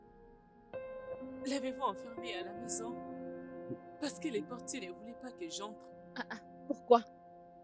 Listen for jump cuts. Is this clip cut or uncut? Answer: cut